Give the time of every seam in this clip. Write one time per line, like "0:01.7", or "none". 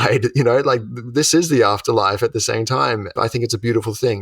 0:03.2